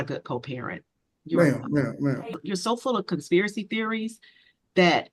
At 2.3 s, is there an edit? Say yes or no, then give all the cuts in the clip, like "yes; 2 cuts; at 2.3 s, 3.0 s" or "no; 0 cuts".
yes; 1 cut; at 2.3 s